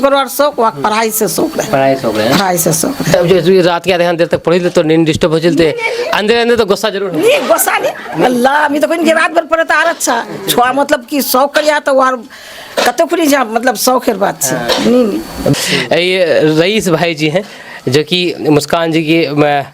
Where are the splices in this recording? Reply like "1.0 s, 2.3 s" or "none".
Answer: none